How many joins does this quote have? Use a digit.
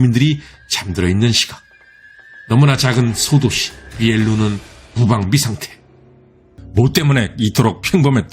1